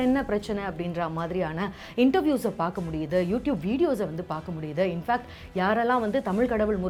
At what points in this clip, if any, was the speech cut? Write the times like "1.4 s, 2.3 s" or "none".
none